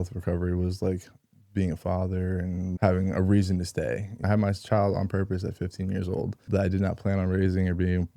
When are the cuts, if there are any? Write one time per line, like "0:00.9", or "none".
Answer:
0:02.7
0:04.2
0:06.4